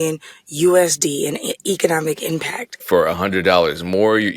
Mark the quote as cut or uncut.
cut